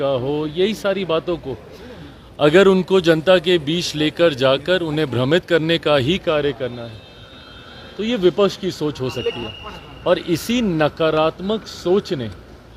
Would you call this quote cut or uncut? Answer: uncut